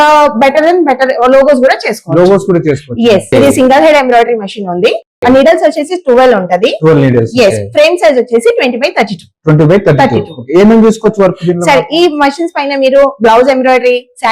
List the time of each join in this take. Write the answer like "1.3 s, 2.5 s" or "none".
3.3 s